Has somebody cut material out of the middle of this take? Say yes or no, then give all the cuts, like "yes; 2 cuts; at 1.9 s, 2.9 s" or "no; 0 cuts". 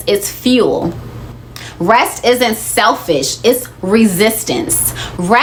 no; 0 cuts